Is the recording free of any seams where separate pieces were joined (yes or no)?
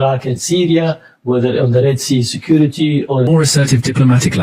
no